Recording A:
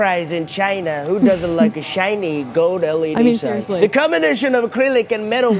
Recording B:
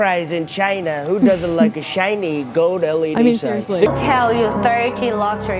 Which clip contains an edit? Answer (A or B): B